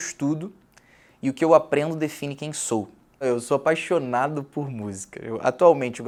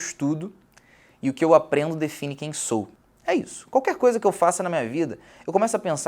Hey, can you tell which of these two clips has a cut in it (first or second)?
second